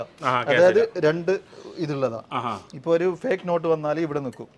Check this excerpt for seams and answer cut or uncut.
uncut